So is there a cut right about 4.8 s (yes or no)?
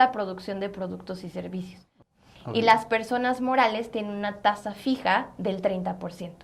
no